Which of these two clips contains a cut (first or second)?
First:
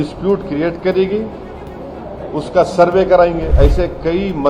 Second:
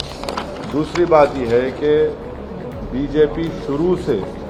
first